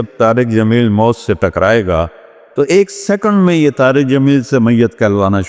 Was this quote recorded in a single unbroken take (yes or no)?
yes